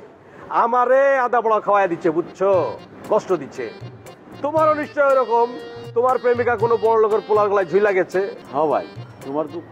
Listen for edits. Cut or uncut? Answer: cut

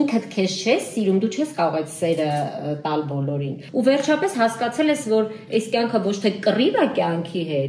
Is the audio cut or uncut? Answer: cut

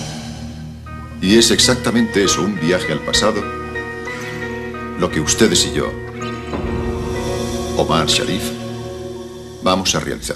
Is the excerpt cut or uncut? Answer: uncut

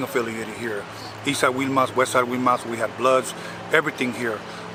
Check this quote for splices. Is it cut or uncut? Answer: uncut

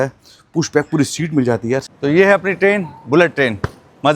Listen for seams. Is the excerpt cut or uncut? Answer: cut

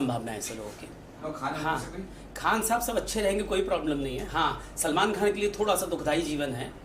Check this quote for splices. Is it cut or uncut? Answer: cut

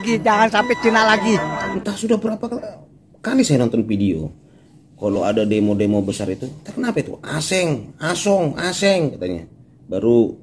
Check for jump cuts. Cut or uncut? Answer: cut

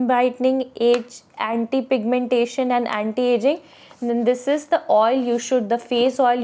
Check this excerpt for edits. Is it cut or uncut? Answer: uncut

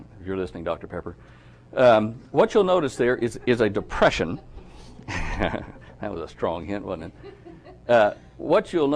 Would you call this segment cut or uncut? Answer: cut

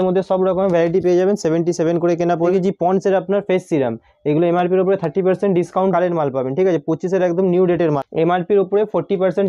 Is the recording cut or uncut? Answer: cut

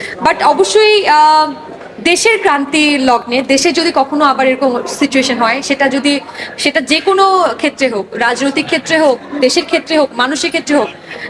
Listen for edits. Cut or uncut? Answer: uncut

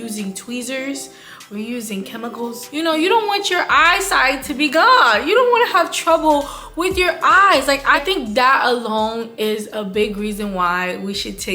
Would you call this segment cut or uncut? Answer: cut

